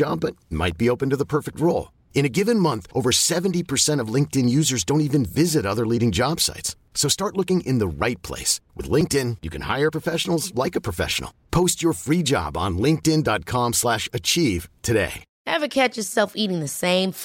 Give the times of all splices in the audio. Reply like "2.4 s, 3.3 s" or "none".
15.3 s